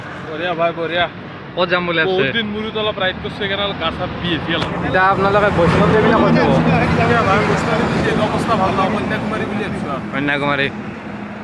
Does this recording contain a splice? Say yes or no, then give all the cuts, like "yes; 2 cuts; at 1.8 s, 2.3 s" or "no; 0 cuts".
no; 0 cuts